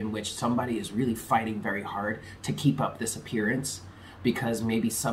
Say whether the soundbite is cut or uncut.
uncut